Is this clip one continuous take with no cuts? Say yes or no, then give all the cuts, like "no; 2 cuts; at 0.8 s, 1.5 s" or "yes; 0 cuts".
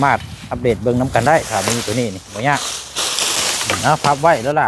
no; 1 cut; at 3.6 s